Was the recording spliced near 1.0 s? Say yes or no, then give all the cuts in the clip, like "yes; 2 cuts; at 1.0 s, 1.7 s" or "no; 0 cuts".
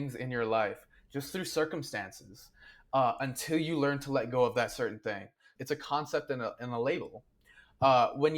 no; 1 cut; at 5.5 s